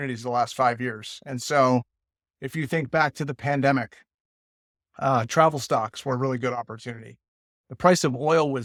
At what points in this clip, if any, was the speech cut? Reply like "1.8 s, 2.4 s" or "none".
none